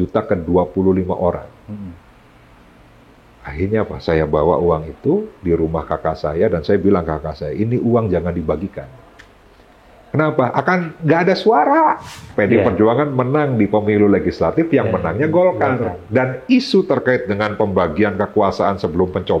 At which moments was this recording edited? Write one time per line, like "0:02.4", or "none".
0:12.3